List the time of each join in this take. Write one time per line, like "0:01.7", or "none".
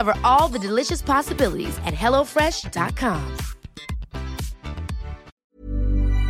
0:05.3

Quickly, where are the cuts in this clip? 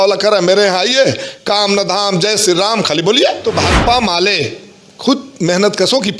0:03.4

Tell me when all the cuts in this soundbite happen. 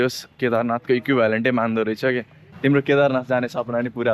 0:02.4

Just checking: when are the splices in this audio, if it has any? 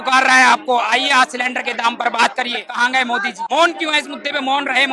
0:02.9

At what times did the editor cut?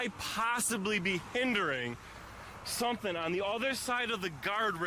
none

